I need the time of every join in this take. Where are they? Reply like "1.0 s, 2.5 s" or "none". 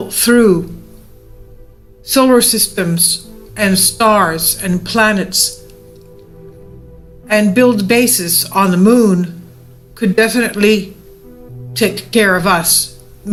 none